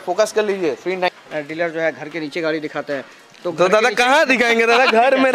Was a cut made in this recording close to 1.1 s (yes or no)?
yes